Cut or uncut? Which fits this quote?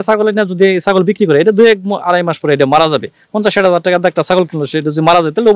uncut